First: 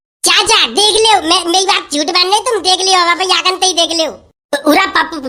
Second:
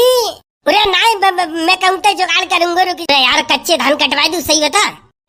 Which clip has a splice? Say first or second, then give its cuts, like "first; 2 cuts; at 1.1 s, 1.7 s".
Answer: second; 1 cut; at 3.0 s